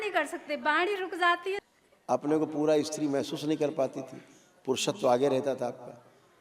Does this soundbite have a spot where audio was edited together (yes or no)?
yes